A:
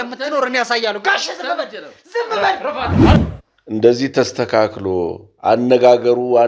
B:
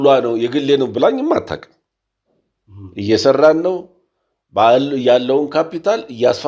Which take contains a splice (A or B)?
A